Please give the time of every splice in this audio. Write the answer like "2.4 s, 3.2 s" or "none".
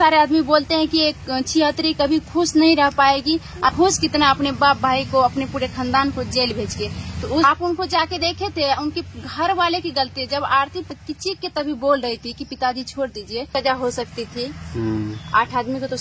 3.7 s, 7.4 s, 10.9 s, 13.5 s